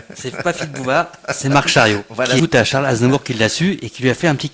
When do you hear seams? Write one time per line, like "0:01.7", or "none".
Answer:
0:02.4